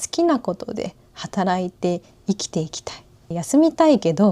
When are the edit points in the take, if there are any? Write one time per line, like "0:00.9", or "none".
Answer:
0:03.3